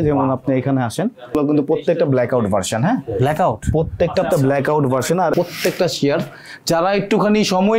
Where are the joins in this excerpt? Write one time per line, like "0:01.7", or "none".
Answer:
0:01.3
0:05.3